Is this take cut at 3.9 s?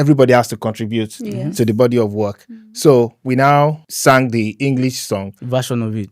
yes; 1 cut; at 3.9 s

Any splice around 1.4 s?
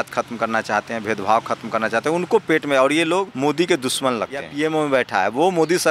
no; 2 cuts; at 3.3 s, 4.5 s

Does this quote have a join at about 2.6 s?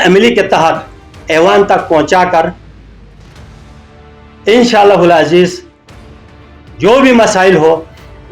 no; 0 cuts

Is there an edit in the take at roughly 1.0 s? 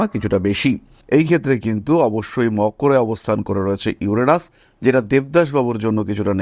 yes; 1 cut; at 1.0 s

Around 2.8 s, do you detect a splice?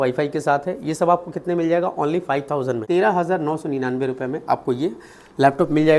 yes; 1 cut; at 2.8 s

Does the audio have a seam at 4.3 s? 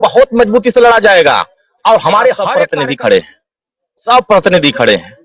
no; 1 cut; at 2.5 s

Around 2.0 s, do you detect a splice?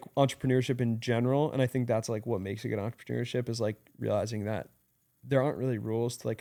no; 0 cuts

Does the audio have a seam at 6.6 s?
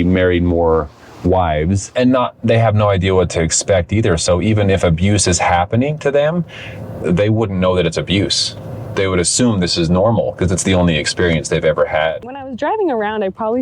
no; 2 cuts; at 1.8 s, 12.3 s

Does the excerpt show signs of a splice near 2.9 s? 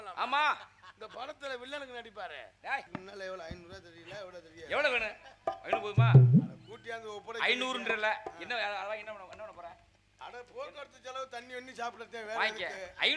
yes; 1 cut; at 2.9 s

